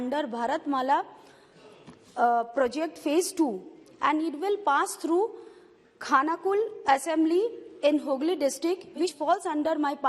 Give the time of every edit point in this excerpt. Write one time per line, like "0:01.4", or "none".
0:09.2

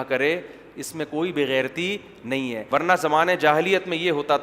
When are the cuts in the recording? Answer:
0:02.6

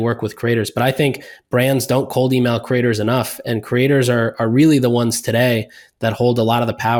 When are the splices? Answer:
none

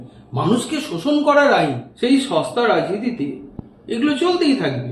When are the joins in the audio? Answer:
0:01.8

